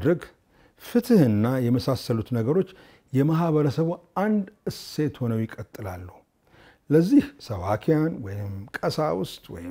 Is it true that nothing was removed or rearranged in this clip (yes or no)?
yes